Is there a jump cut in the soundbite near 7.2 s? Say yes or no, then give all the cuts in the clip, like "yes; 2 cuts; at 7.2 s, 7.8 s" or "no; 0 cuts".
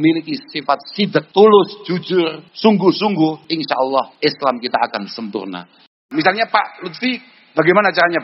no; 4 cuts; at 1.3 s, 2.4 s, 3.7 s, 5.9 s